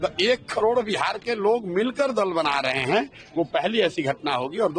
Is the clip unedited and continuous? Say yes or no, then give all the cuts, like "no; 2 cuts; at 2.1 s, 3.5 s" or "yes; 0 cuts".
yes; 0 cuts